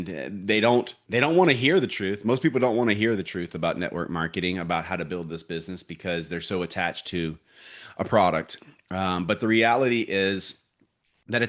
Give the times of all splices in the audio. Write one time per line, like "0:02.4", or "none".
0:01.0